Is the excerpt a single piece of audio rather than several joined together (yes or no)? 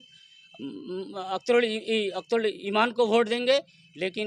yes